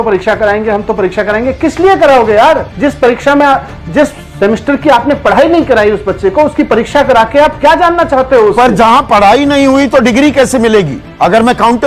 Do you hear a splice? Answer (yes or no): no